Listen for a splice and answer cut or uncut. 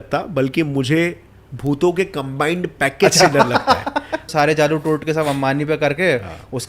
cut